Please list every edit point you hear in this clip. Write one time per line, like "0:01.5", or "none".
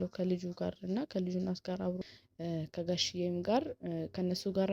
0:02.1

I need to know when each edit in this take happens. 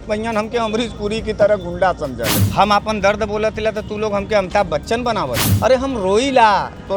0:02.4
0:05.5

